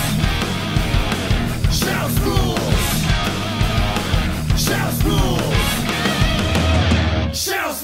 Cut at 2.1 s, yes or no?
no